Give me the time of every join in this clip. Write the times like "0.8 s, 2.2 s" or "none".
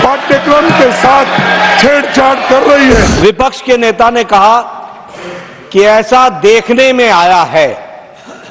3.1 s